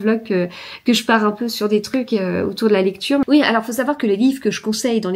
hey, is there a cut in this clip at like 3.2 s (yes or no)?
yes